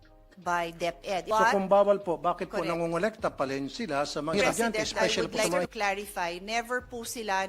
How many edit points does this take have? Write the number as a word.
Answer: two